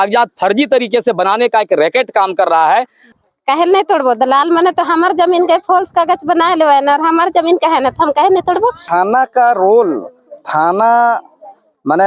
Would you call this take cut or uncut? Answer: cut